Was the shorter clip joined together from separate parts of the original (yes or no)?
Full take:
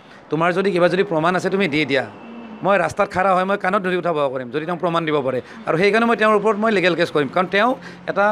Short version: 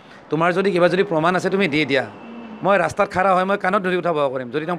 no